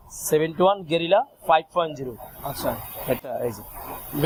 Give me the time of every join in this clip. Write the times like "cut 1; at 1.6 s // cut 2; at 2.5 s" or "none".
none